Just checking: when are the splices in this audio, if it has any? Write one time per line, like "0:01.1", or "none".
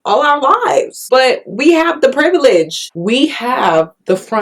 0:01.0
0:02.9